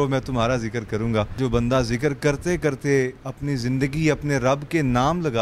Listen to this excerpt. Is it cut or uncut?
cut